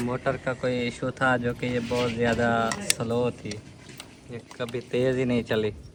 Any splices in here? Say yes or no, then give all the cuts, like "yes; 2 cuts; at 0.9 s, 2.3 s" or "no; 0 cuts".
no; 0 cuts